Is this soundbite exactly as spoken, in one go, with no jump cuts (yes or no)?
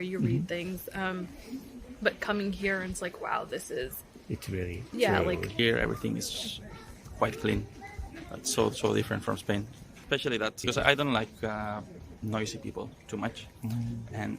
no